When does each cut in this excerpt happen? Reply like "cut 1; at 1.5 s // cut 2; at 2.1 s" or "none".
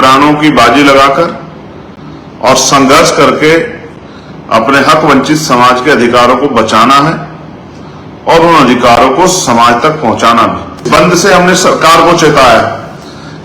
cut 1; at 10.8 s